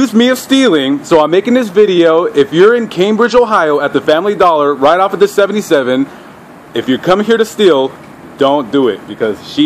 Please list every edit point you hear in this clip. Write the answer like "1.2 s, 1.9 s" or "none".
2.9 s